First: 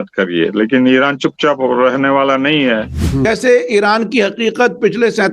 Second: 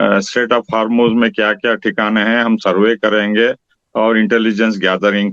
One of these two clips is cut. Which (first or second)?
first